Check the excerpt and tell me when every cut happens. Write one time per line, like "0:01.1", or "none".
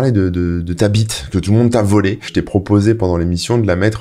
0:02.3